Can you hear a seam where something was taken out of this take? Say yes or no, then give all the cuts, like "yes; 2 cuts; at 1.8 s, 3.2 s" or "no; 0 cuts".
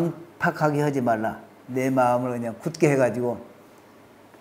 no; 0 cuts